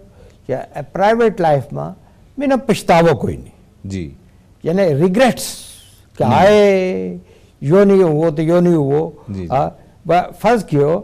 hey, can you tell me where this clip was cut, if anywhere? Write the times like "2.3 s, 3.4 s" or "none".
none

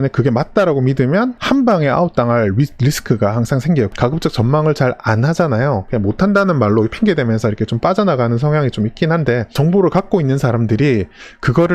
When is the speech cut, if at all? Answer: 1.4 s, 3.9 s, 5.8 s, 9.5 s

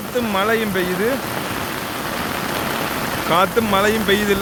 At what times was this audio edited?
none

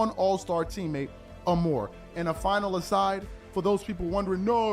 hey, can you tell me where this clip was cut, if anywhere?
2.0 s

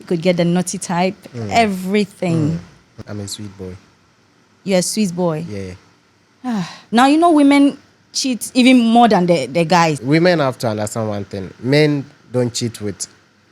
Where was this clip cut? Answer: 3.0 s, 6.8 s, 10.0 s

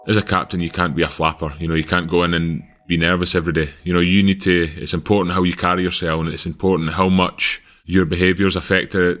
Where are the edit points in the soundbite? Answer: none

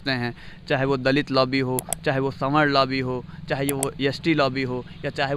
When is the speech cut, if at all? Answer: none

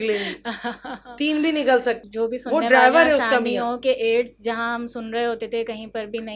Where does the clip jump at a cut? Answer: 2.0 s

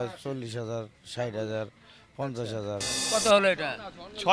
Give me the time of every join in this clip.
3.0 s

